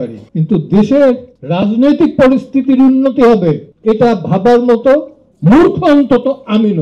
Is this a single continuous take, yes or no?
no